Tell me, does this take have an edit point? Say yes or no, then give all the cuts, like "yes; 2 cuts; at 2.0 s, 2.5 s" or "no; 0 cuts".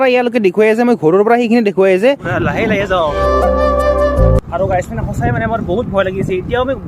yes; 2 cuts; at 2.3 s, 3.2 s